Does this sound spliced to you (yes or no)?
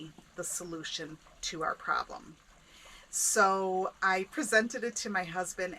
no